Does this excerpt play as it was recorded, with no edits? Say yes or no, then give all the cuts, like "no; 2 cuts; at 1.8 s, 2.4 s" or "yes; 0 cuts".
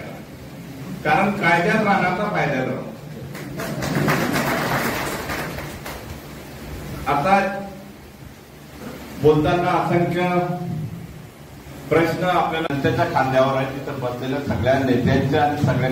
no; 1 cut; at 12.7 s